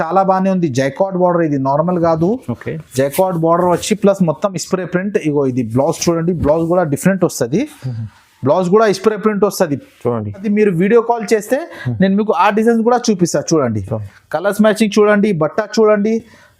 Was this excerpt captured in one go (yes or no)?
no